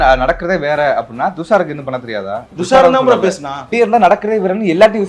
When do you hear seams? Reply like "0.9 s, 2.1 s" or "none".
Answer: 2.4 s, 3.7 s